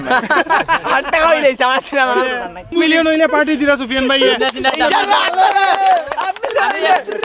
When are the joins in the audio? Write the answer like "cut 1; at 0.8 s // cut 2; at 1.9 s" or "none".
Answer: cut 1; at 2.7 s